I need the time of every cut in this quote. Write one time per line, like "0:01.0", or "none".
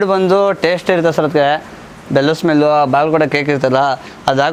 none